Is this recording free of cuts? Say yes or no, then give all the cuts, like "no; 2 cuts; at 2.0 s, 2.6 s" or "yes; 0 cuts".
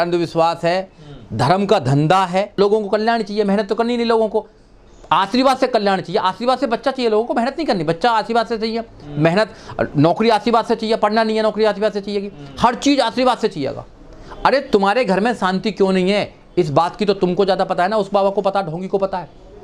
no; 1 cut; at 2.6 s